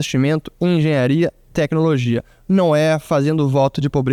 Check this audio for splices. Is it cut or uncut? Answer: uncut